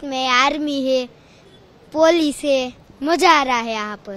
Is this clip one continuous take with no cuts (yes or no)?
no